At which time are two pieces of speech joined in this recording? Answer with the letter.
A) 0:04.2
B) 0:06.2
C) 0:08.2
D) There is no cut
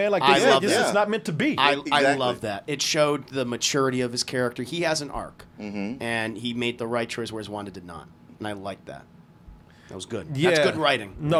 D